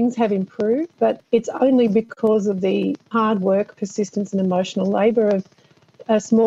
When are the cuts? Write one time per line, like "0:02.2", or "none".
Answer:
0:01.2
0:03.1